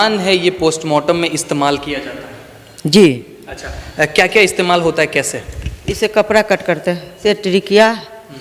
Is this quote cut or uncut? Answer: cut